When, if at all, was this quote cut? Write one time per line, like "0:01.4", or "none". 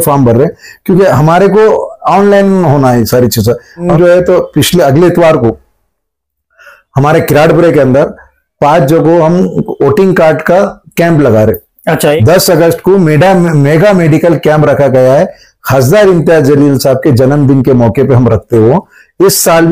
0:03.8
0:12.2